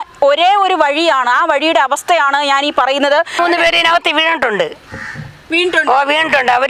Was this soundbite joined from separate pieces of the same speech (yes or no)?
yes